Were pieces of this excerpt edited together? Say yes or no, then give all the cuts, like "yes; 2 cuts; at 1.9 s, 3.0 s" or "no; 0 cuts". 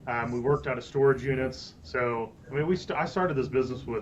yes; 1 cut; at 2.4 s